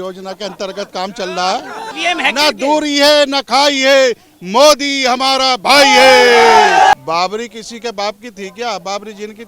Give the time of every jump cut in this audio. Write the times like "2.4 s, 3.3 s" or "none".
1.9 s, 6.9 s